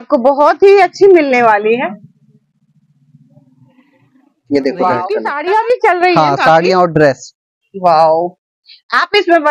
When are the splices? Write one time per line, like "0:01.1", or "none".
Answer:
0:05.3